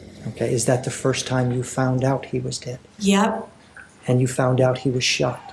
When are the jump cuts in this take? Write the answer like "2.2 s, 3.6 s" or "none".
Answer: none